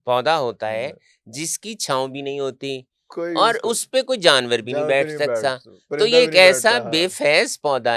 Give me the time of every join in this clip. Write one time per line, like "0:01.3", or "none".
none